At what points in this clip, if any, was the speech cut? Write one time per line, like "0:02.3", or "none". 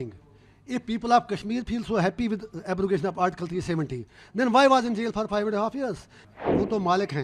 0:06.1